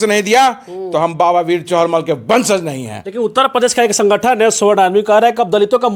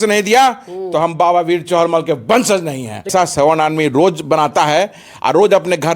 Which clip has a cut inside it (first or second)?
second